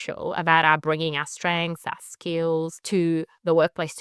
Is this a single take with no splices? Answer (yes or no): no